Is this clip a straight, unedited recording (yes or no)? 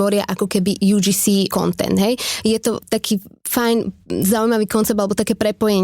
no